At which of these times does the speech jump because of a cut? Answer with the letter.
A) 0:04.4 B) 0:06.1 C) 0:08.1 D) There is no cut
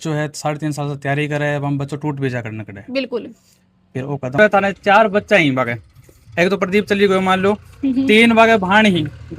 A